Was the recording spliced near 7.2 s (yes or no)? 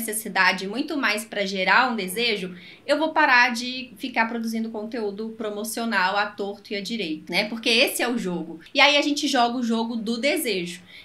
yes